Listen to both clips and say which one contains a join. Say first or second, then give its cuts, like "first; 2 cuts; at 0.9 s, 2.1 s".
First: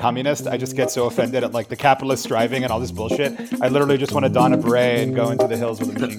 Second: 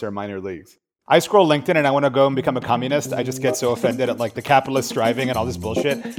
second; 1 cut; at 0.9 s